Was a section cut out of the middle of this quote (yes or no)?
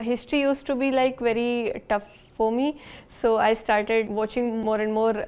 yes